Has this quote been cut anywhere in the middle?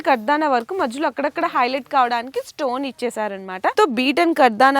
yes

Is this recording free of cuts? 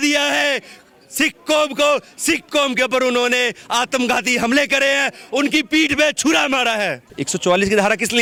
yes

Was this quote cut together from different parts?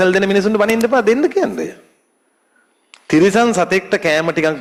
no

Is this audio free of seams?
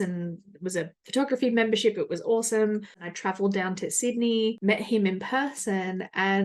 no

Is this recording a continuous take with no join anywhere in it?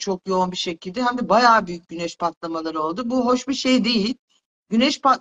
yes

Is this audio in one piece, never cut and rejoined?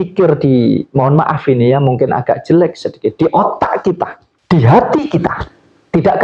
yes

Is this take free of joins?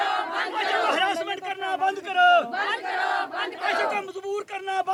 yes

